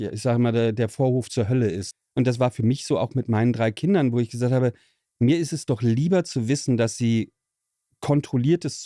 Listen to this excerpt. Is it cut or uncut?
cut